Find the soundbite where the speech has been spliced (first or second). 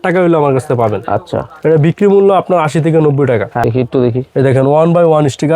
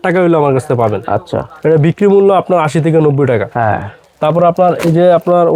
first